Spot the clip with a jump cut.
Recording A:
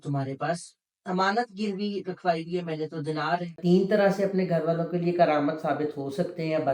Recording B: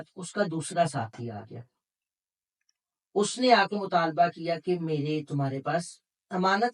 A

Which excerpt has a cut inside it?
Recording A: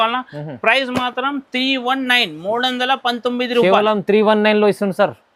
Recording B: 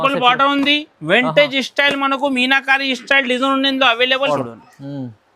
B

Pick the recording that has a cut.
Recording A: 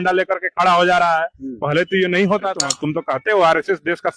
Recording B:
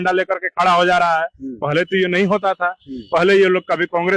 A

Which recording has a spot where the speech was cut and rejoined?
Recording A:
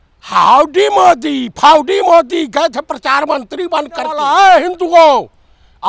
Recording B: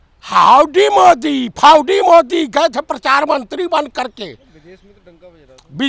A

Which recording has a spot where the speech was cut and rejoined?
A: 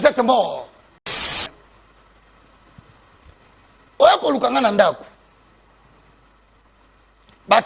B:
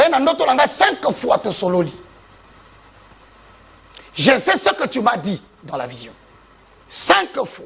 A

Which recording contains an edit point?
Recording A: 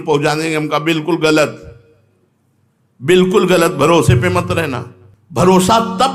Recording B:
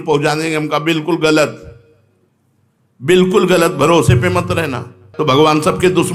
B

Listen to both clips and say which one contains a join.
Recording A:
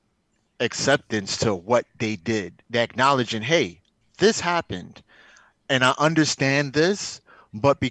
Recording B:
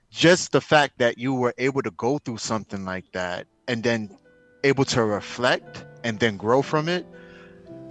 A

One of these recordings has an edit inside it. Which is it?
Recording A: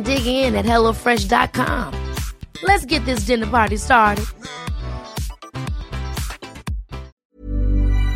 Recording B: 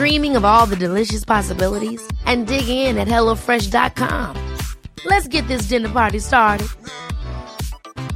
A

